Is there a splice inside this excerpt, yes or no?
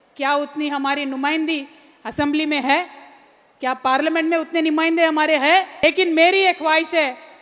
yes